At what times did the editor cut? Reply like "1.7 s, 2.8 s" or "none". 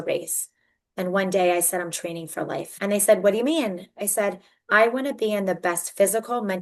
2.7 s